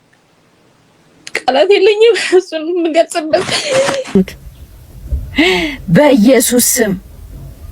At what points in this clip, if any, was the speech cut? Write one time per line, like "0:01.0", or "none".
0:04.1